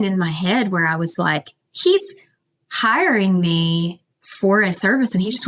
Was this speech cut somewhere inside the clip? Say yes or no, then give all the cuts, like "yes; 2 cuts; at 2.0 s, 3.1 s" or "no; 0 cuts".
no; 0 cuts